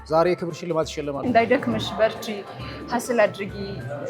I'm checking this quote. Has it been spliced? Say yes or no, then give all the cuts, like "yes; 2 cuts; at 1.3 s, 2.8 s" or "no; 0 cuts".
yes; 1 cut; at 1.2 s